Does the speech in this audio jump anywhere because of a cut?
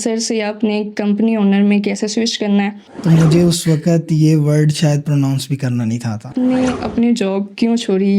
yes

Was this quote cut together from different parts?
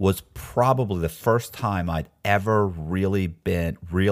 no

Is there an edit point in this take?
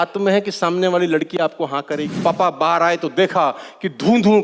yes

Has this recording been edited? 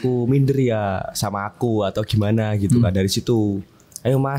no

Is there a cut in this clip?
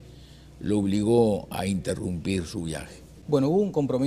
yes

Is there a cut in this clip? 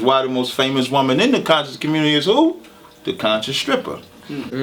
no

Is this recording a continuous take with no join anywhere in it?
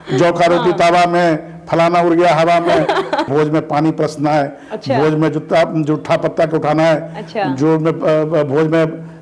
no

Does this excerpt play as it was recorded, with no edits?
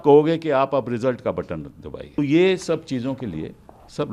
no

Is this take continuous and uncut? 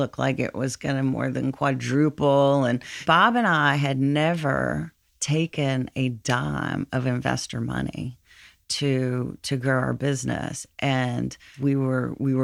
no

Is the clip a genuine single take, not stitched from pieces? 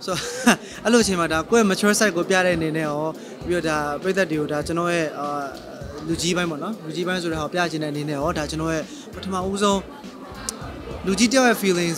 no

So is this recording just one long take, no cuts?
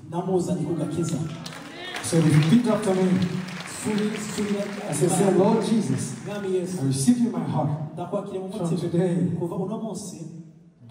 yes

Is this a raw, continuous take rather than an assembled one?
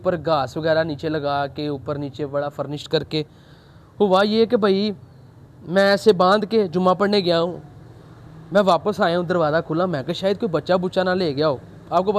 yes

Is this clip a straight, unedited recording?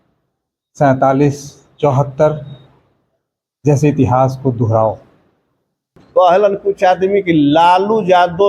no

